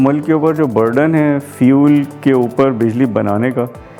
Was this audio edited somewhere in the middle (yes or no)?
no